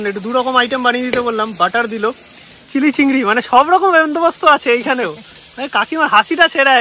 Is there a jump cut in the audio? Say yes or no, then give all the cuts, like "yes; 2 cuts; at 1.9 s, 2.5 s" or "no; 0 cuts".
no; 0 cuts